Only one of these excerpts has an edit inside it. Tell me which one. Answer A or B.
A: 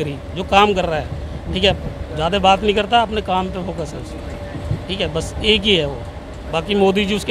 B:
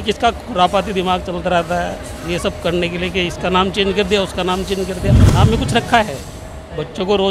B